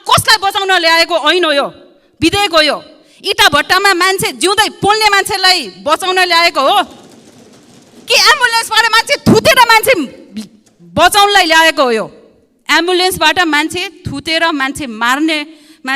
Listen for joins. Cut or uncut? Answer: uncut